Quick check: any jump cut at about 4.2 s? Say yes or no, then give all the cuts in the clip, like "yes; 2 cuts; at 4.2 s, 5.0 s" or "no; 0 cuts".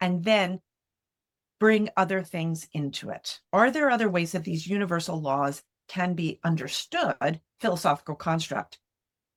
no; 0 cuts